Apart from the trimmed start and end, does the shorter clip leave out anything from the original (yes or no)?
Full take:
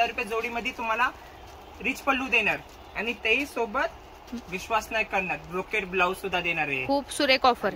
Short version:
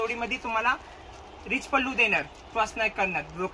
yes